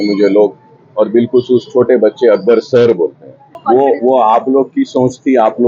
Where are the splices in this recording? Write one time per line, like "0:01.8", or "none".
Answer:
0:03.5